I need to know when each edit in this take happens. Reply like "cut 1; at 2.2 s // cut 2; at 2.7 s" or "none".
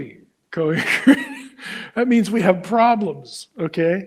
none